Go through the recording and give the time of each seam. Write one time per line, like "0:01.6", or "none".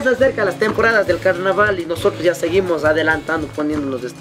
none